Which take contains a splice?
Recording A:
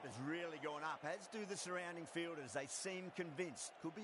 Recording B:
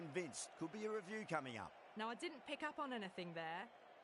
B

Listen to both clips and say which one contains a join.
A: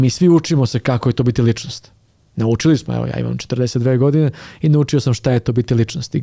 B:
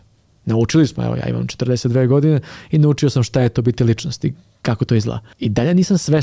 B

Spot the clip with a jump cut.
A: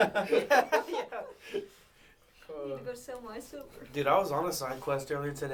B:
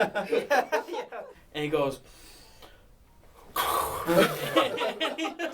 B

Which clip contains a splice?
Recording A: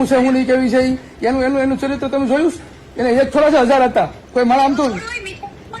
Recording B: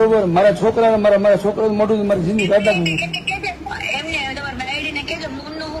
A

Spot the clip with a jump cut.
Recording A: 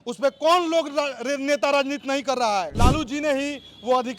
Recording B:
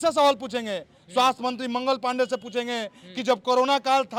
A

